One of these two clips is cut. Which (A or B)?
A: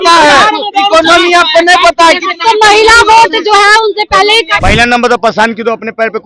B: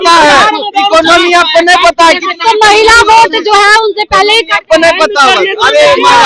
A